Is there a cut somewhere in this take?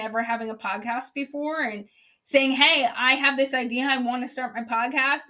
no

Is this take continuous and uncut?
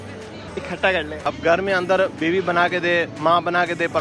no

